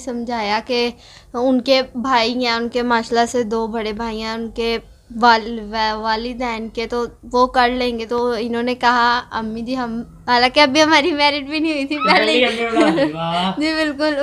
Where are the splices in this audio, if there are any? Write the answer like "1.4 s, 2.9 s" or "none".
8.1 s